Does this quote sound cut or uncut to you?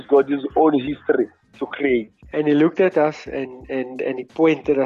cut